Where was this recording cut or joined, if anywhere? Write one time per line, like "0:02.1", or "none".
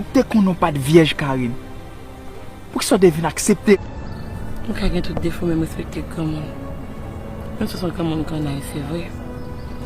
0:03.8